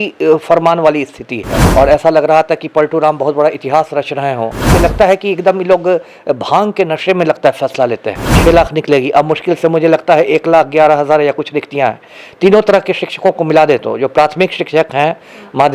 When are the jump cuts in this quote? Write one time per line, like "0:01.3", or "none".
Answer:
0:01.5
0:04.7
0:08.4